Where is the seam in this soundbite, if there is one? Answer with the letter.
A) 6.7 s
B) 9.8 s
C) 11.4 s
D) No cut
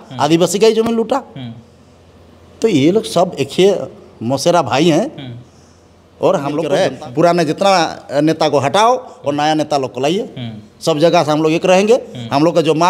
A